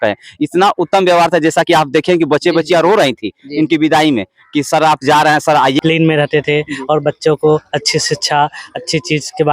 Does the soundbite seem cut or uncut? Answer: cut